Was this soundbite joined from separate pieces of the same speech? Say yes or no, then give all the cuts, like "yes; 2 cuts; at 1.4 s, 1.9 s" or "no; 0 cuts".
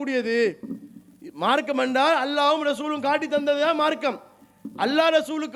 no; 0 cuts